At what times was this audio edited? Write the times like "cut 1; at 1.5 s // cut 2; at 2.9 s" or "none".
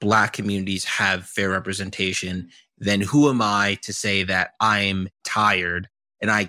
none

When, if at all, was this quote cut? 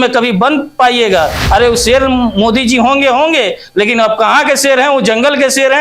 cut 1; at 1.4 s

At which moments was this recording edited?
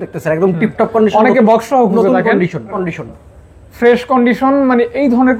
cut 1; at 2.9 s

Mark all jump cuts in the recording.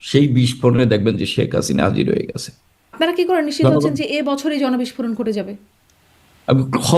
cut 1; at 2.8 s

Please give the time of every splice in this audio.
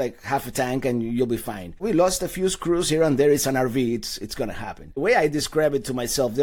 cut 1; at 1.8 s // cut 2; at 5.0 s

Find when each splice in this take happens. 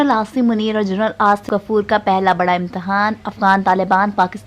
cut 1; at 1.4 s

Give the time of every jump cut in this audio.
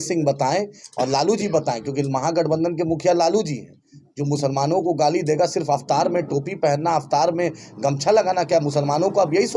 none

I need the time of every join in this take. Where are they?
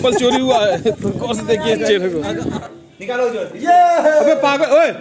cut 1; at 2.4 s

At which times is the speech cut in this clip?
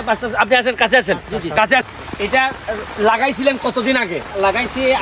cut 1; at 2.0 s

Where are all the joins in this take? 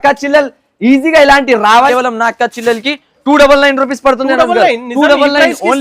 cut 1; at 1.9 s

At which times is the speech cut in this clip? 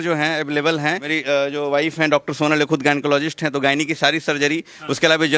cut 1; at 1.1 s

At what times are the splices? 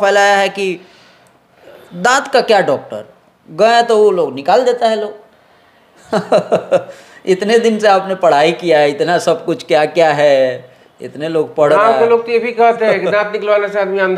none

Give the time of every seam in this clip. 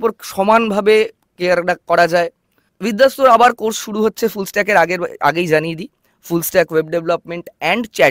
cut 1; at 2.7 s

